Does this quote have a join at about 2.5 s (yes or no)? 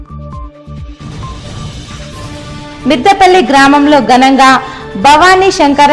yes